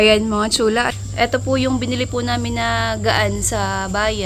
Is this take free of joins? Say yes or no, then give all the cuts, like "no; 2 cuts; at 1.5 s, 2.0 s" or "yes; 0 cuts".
no; 1 cut; at 0.9 s